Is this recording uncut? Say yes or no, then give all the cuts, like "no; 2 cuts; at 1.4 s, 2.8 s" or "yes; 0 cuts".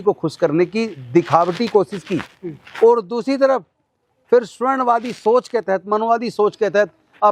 yes; 0 cuts